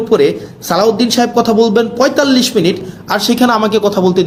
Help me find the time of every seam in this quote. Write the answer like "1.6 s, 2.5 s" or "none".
none